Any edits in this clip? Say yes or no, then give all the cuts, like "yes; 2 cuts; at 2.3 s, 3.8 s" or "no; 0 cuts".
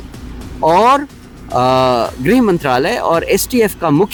no; 0 cuts